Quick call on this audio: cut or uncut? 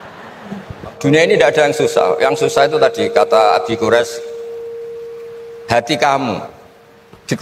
cut